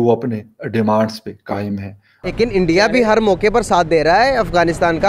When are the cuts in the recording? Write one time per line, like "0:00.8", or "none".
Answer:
0:02.3